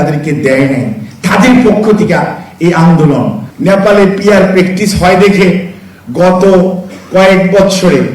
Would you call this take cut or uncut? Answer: cut